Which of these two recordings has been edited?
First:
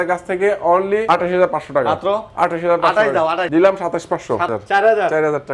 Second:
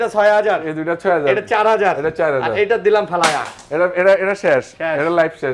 first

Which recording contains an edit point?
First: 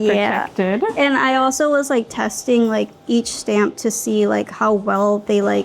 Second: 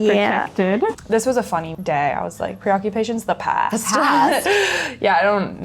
second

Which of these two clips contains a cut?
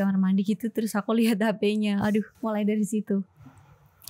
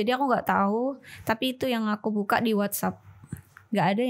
first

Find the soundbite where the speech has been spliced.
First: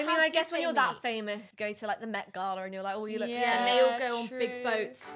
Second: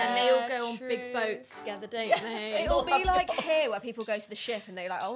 first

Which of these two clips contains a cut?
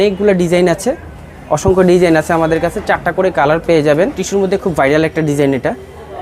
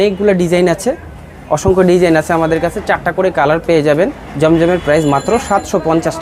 first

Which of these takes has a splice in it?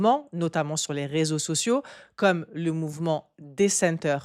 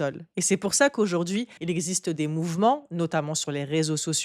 second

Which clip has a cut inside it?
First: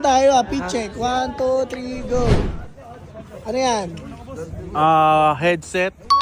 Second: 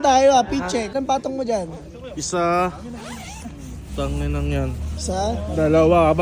second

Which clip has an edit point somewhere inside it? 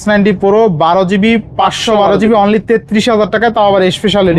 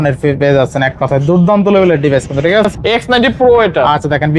second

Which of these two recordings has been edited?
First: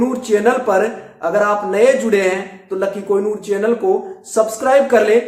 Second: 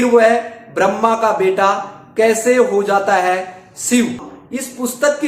second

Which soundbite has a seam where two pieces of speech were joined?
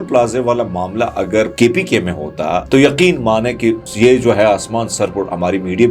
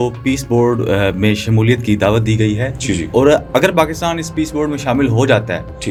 first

